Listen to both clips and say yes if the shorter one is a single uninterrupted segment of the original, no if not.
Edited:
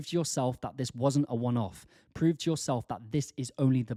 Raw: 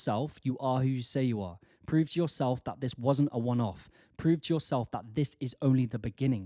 yes